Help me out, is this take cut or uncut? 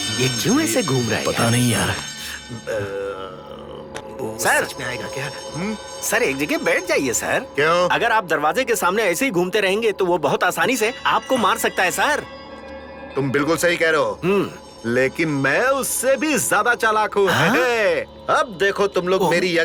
uncut